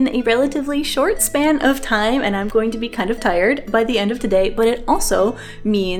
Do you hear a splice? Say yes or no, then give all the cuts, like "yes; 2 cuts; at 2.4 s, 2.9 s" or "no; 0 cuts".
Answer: no; 0 cuts